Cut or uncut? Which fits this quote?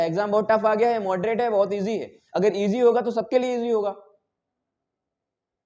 uncut